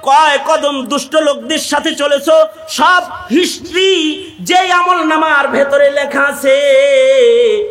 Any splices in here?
no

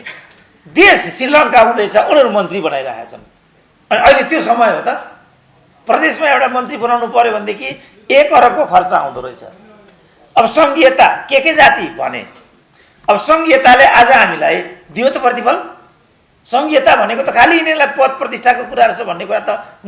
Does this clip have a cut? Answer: no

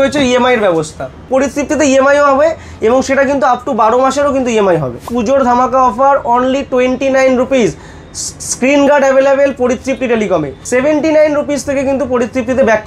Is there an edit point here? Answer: yes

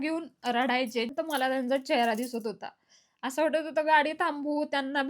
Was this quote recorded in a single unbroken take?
no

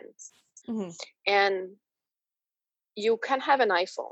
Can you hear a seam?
no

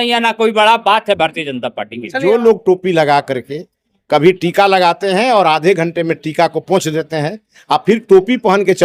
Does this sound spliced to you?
yes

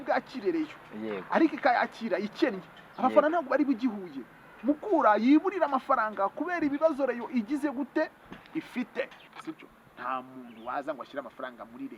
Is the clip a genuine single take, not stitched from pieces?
no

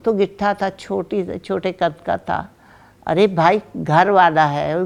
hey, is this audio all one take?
yes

